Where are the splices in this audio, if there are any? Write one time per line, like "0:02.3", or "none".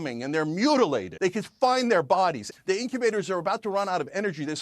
0:01.1
0:02.4